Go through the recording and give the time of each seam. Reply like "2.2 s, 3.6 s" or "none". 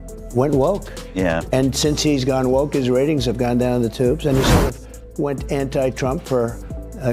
none

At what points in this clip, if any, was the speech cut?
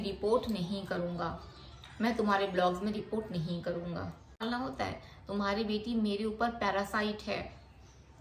4.4 s

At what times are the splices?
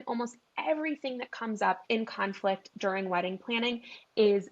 1.8 s

